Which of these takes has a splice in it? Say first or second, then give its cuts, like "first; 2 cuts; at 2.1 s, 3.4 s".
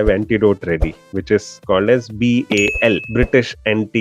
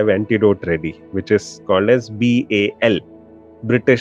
first; 1 cut; at 3.1 s